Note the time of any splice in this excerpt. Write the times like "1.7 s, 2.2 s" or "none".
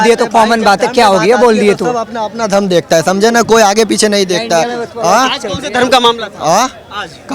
none